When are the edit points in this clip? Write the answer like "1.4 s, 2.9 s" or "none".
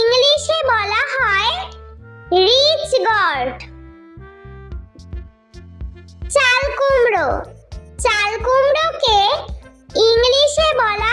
none

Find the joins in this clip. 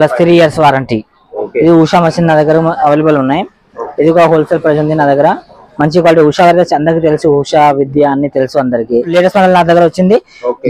1.4 s, 9.1 s

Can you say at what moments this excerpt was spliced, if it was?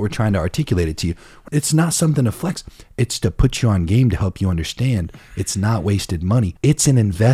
1.4 s

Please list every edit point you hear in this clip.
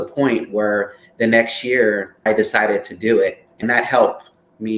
2.1 s, 3.6 s

